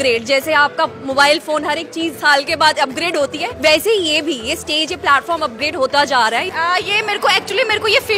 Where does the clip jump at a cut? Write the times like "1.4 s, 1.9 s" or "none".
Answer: 3.5 s, 6.5 s